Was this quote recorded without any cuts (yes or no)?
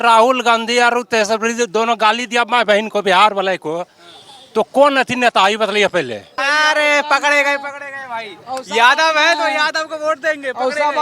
no